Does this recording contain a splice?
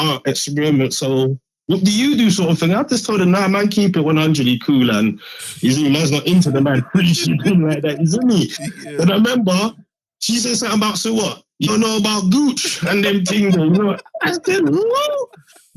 no; 0 cuts

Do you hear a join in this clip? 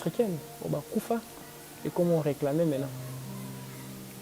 no; 0 cuts

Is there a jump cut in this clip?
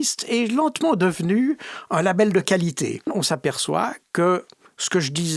yes; 1 cut; at 3.1 s

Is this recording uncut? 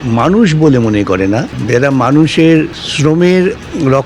no; 2 cuts; at 1.5 s, 2.8 s

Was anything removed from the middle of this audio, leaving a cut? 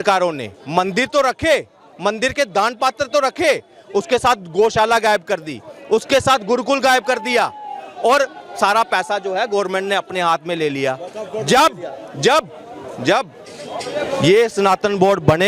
no; 0 cuts

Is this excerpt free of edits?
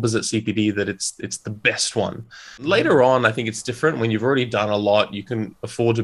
no; 1 cut; at 2.6 s

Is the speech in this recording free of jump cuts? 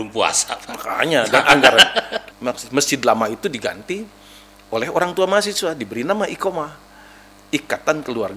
no; 1 cut; at 2.1 s

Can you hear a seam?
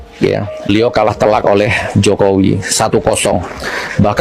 no; 0 cuts

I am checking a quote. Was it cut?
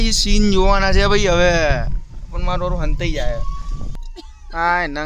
yes; 1 cut; at 3.9 s

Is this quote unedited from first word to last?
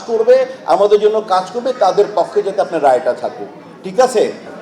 yes; 0 cuts

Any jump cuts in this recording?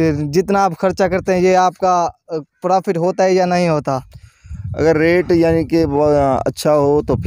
no; 0 cuts

